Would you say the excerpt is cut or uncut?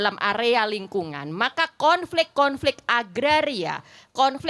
uncut